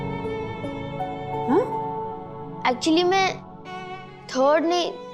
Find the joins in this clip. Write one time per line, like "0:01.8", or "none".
none